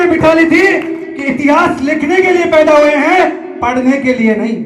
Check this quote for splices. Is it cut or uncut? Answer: uncut